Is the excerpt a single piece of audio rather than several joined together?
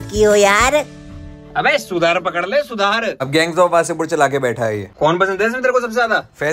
no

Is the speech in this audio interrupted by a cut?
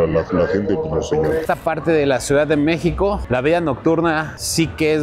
yes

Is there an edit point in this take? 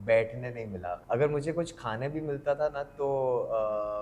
yes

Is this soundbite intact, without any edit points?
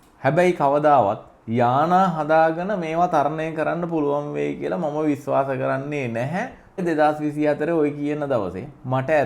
no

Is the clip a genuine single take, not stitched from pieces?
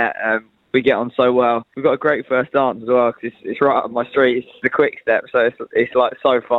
no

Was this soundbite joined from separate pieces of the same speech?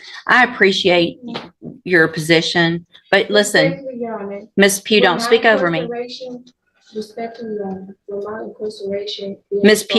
no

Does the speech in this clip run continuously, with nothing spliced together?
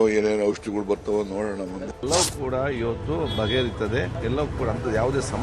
no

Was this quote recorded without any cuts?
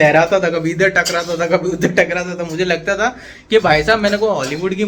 yes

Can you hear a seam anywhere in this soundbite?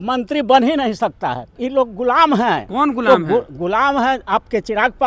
yes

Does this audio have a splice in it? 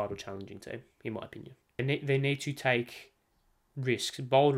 yes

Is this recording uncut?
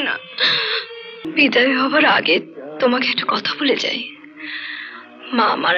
no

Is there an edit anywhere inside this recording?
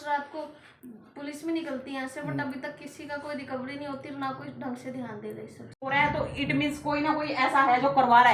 yes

